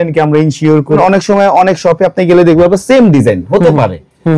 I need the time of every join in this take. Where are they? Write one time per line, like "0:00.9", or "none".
0:01.0